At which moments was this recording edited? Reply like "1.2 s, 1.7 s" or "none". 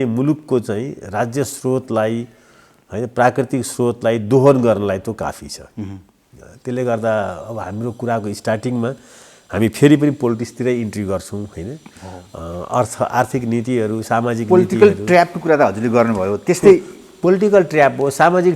none